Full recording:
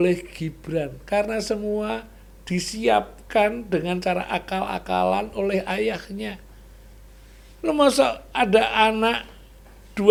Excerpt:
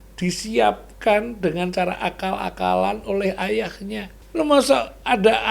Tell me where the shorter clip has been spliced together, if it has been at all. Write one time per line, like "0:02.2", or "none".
0:04.1

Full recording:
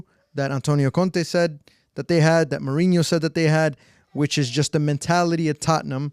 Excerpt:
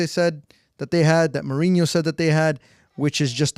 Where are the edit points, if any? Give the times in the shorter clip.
none

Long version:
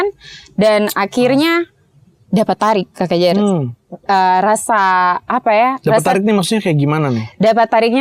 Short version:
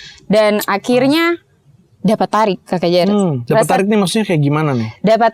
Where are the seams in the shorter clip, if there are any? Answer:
0:03.4

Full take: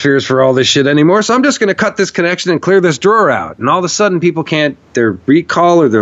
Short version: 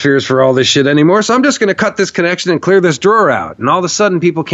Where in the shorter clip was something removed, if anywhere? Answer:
none

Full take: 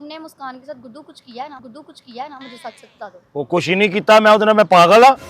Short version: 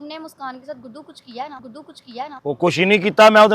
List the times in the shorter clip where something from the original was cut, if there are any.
0:02.4

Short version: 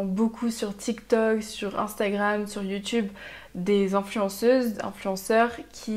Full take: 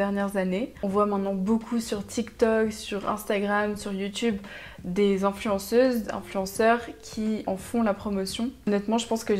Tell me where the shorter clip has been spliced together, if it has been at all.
none

